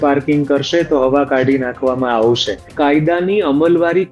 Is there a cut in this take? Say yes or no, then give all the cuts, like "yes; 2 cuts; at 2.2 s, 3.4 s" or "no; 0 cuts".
yes; 1 cut; at 2.7 s